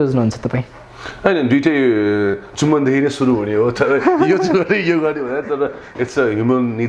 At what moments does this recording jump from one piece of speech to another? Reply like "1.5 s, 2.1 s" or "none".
none

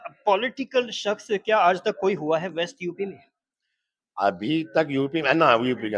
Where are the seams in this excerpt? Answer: none

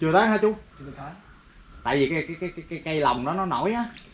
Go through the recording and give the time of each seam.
none

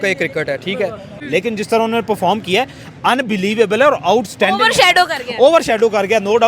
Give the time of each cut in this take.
1.2 s

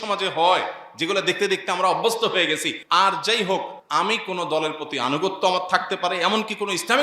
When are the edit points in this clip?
2.7 s, 3.8 s

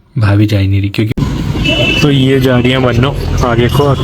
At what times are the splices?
1.1 s

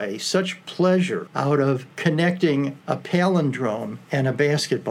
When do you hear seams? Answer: 1.5 s, 2.8 s, 4.0 s

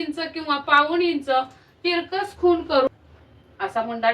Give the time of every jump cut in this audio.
2.9 s

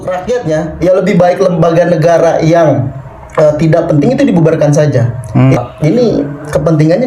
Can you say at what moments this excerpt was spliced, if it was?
5.6 s

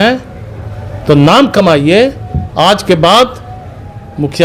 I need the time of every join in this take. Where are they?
none

